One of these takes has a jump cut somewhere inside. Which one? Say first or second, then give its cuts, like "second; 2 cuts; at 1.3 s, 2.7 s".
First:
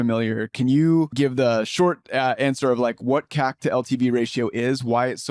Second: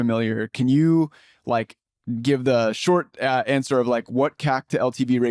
first; 1 cut; at 1.1 s